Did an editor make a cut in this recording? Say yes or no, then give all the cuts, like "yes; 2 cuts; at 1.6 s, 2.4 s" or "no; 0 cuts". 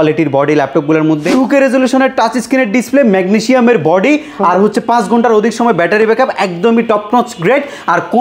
yes; 1 cut; at 1.3 s